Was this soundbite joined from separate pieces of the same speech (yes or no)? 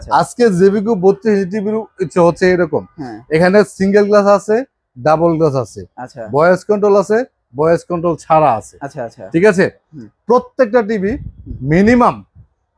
no